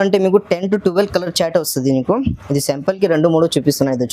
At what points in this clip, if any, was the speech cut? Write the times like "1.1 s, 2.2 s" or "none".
none